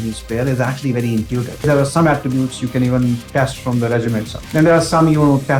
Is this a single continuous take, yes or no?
no